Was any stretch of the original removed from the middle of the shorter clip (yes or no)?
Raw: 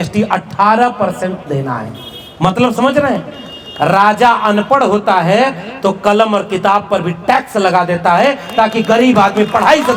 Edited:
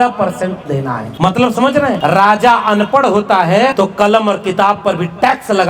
yes